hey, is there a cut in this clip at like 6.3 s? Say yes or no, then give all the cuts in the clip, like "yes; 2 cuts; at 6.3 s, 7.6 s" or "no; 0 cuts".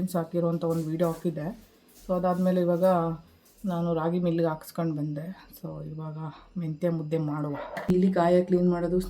no; 1 cut; at 7.9 s